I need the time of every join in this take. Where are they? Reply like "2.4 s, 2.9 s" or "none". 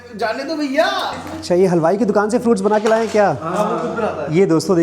1.3 s